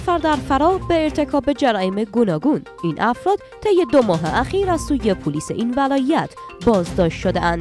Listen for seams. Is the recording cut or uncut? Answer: uncut